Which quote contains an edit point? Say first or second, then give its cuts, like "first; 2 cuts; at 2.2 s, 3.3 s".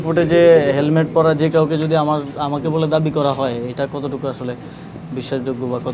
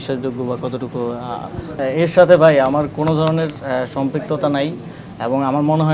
second; 1 cut; at 1.7 s